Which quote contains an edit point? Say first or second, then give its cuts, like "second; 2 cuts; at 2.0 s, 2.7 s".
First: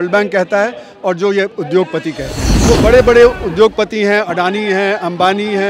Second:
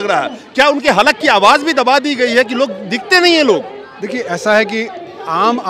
first; 1 cut; at 2.5 s